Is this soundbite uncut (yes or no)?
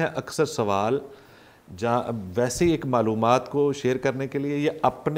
yes